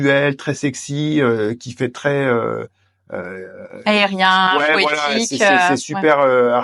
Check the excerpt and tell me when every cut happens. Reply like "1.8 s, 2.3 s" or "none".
none